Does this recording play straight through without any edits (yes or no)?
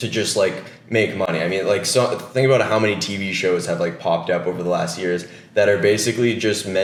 yes